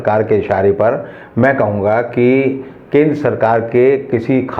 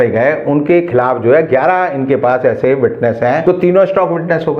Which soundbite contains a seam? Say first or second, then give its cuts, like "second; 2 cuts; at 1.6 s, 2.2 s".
second; 1 cut; at 3.4 s